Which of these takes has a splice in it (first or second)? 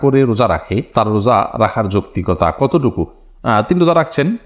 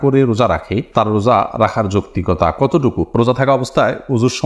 second